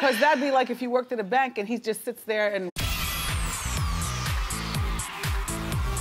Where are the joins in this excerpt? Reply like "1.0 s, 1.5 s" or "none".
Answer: none